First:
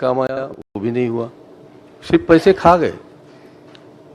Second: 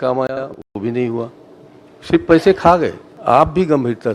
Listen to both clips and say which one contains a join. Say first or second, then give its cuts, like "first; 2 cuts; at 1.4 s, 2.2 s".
second; 1 cut; at 3.1 s